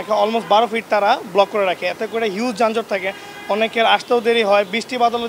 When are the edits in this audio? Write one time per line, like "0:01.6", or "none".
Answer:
none

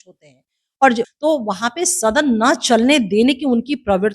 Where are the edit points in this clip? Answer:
0:01.1

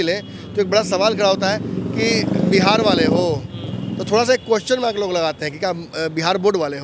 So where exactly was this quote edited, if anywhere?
none

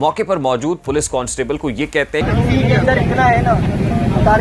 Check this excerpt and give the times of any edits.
0:02.2

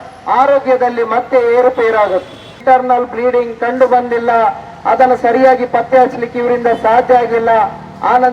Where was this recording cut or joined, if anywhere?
0:02.5

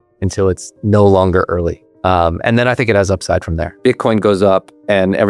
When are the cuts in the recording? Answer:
0:01.8
0:03.7

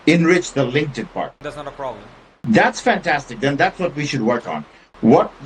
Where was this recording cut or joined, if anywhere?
none

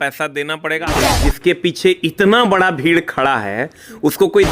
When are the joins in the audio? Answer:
0:01.0

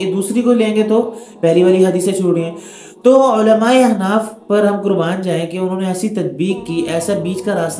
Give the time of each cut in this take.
none

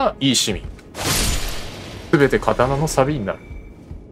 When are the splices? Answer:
none

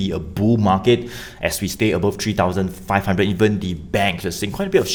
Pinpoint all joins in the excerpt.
none

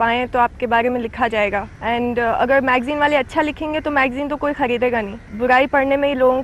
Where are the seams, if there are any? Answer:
0:01.7
0:05.2

